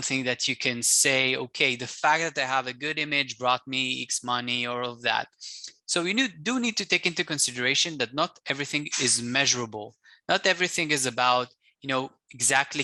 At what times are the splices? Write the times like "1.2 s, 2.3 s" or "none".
none